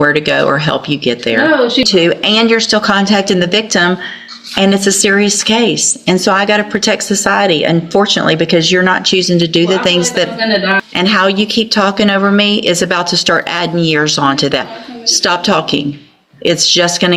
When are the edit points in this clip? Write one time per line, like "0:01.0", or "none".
0:01.9
0:10.8